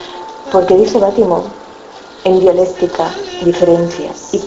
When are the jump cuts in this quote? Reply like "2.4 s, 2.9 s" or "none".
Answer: 2.1 s